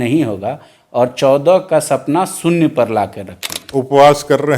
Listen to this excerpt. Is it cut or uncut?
cut